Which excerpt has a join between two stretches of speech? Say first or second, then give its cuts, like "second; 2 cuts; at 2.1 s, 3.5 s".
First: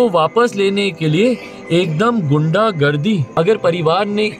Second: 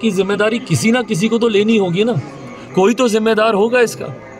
first; 1 cut; at 3.3 s